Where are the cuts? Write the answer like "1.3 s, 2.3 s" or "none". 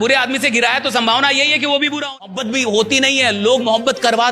2.3 s